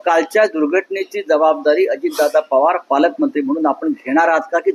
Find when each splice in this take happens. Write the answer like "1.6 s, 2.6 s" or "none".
none